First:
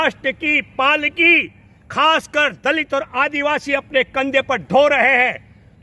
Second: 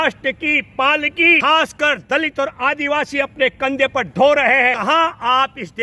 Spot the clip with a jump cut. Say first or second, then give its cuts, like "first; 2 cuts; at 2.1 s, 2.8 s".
second; 2 cuts; at 1.4 s, 4.8 s